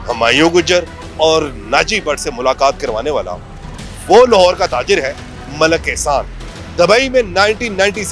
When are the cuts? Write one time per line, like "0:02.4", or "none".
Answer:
none